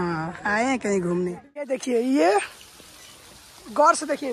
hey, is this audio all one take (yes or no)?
no